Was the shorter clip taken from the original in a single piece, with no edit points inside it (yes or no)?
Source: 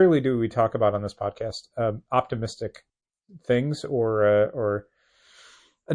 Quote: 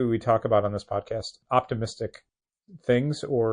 no